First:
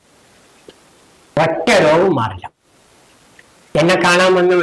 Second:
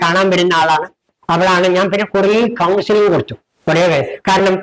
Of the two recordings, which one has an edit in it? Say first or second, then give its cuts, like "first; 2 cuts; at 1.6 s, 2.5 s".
second; 1 cut; at 1.1 s